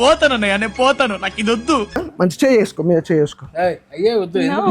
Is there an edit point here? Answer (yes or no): yes